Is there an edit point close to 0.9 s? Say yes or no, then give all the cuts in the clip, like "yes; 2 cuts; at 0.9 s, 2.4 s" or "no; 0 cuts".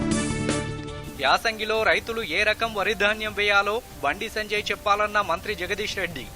yes; 1 cut; at 0.9 s